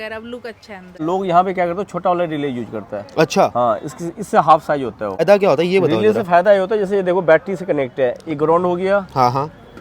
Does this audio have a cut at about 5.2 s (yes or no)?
yes